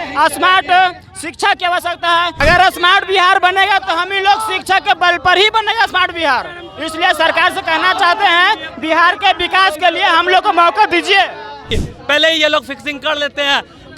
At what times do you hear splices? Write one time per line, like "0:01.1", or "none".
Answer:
0:02.3
0:11.8